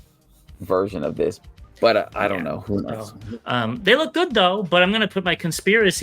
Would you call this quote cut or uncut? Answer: cut